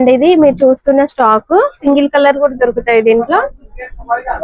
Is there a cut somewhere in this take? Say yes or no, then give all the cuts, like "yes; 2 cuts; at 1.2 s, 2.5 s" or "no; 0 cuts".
yes; 1 cut; at 1.8 s